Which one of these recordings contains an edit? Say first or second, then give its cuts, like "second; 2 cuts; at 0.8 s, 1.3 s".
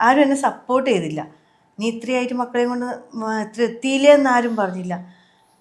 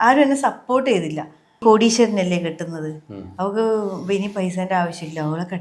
second; 1 cut; at 1.6 s